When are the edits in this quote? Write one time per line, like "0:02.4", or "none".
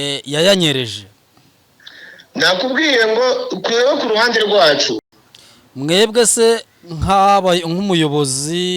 0:05.1

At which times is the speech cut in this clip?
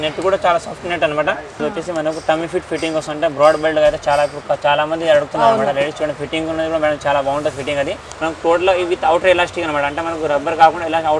0:01.5
0:08.1

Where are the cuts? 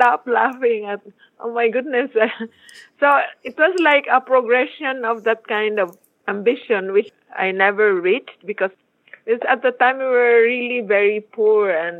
0:07.1
0:08.8

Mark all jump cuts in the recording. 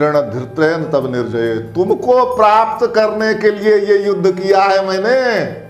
none

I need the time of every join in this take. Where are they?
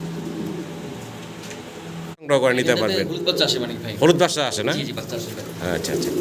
0:02.3

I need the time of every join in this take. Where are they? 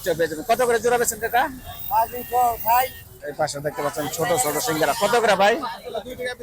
0:03.2

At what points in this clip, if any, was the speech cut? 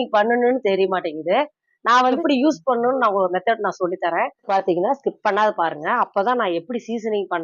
0:02.2
0:04.5

